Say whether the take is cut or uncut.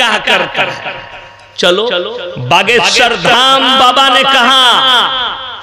uncut